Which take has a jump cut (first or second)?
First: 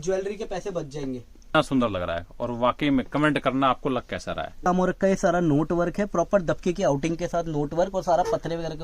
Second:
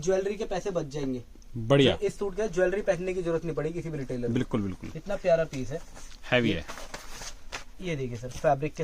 first